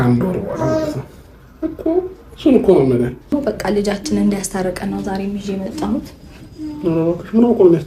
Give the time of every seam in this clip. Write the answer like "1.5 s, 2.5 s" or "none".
3.3 s